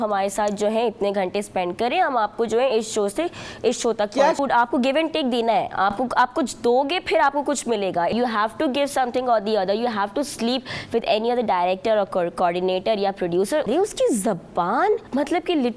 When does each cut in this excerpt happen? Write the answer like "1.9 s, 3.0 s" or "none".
4.4 s, 8.1 s, 13.7 s